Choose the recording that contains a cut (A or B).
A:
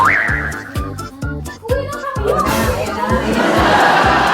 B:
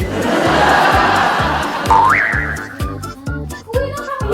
A